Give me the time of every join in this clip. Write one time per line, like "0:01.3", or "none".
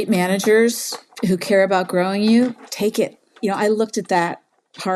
0:03.4